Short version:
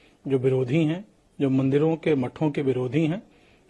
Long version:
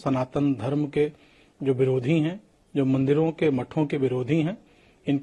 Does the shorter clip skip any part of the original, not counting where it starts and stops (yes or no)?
no